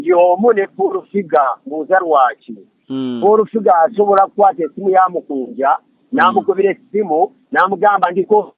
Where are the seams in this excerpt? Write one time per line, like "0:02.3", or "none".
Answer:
none